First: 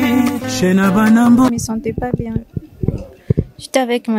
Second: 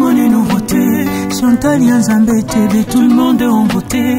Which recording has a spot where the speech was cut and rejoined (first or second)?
first